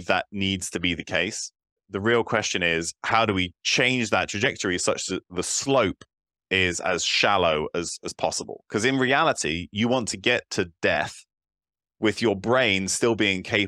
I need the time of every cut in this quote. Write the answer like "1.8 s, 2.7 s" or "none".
1.9 s